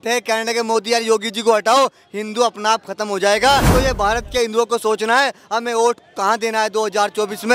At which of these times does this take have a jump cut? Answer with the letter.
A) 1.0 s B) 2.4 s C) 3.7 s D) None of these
C